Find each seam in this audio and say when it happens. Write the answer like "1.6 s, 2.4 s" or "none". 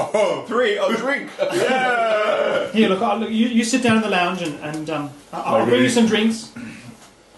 2.7 s

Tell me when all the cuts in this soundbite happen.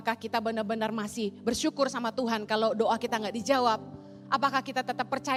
none

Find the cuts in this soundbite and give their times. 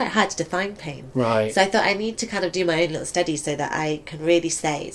none

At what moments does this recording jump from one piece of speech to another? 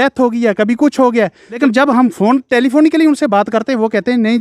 1.6 s

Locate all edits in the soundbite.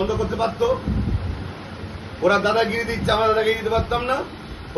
none

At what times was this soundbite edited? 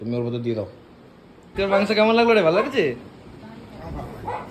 1.5 s

